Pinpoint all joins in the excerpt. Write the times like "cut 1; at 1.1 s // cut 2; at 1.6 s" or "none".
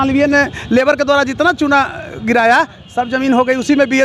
none

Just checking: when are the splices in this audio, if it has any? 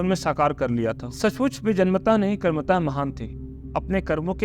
cut 1; at 1.1 s

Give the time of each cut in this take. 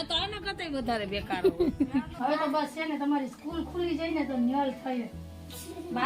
cut 1; at 2.1 s

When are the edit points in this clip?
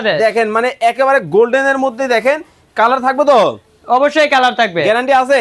none

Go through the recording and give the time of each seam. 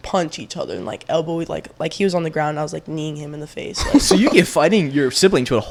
none

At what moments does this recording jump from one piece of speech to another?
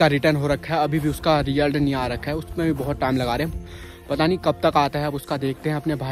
none

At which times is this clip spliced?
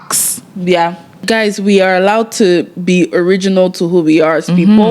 cut 1; at 1.2 s

